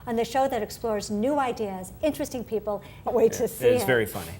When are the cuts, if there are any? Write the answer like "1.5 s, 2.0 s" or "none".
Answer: none